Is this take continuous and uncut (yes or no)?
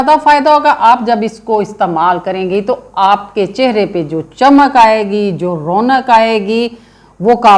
yes